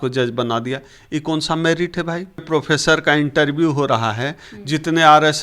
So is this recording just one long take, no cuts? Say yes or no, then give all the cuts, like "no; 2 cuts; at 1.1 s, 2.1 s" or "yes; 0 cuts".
no; 1 cut; at 2.4 s